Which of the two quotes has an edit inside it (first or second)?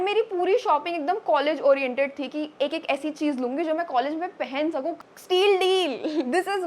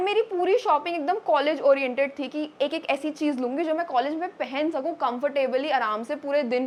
first